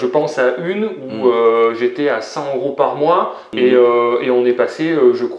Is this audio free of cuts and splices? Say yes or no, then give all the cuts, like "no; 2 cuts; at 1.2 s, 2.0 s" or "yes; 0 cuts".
no; 1 cut; at 3.5 s